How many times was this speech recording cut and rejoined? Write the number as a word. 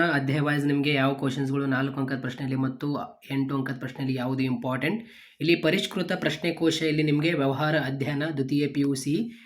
zero